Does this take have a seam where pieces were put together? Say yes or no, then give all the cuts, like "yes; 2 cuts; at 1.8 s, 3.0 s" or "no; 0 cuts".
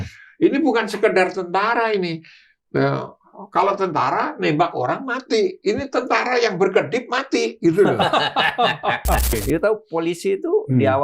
yes; 1 cut; at 9.4 s